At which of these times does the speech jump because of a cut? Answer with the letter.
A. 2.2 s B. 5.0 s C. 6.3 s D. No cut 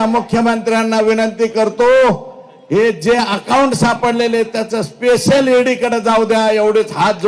D